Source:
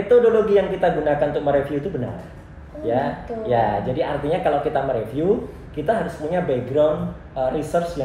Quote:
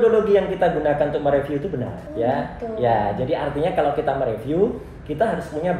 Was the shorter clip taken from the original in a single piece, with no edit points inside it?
no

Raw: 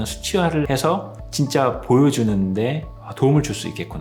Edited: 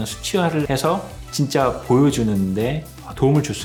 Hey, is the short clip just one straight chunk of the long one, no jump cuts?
yes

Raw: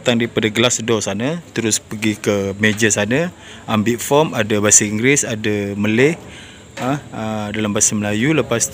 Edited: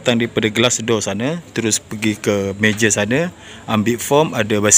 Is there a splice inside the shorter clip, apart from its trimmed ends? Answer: no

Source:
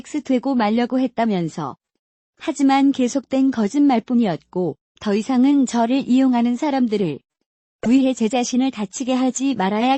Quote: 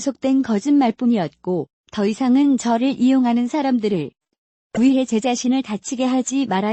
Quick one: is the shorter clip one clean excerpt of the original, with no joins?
yes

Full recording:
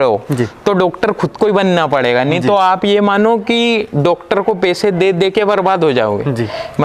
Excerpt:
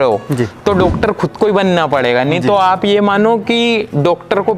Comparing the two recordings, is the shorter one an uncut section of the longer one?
yes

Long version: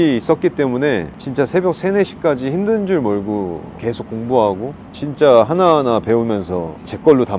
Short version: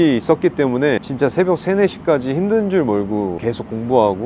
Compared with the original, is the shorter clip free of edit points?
no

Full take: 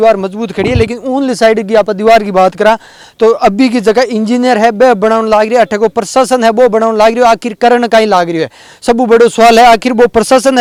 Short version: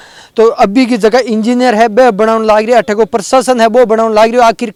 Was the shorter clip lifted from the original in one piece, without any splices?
yes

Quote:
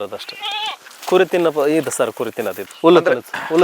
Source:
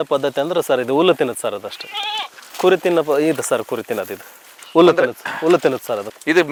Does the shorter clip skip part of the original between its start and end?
yes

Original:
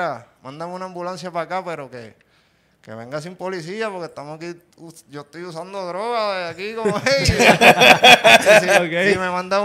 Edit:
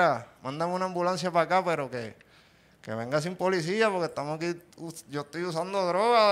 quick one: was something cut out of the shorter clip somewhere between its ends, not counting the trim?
no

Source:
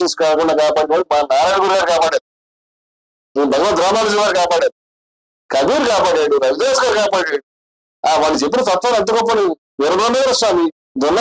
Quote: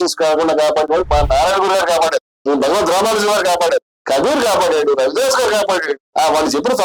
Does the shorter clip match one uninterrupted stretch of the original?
no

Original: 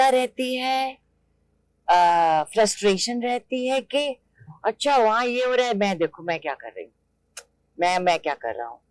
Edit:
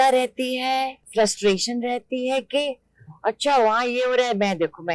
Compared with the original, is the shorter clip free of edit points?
no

